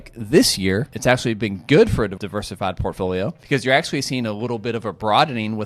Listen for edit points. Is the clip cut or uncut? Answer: cut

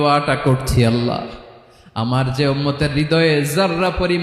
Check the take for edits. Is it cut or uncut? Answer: uncut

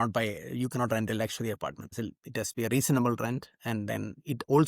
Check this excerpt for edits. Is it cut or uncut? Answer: cut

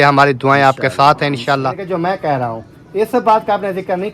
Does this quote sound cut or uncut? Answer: cut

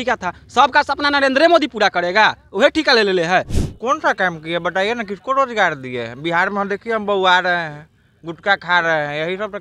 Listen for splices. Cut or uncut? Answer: cut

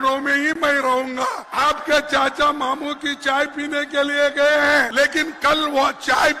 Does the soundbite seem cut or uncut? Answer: cut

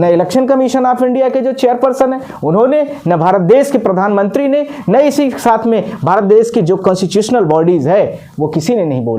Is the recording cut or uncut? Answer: uncut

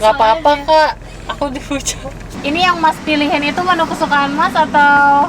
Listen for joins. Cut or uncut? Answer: cut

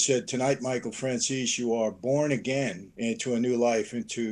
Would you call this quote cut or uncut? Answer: cut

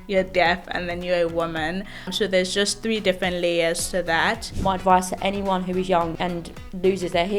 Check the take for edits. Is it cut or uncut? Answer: cut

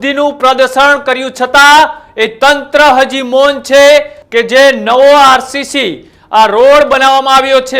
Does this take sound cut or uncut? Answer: cut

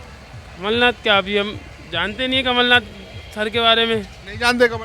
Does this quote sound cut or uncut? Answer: uncut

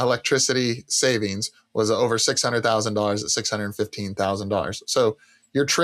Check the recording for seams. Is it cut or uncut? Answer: uncut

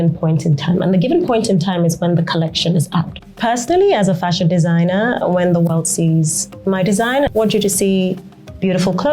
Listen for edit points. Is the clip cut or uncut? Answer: cut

